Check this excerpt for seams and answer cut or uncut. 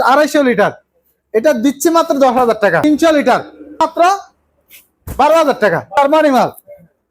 cut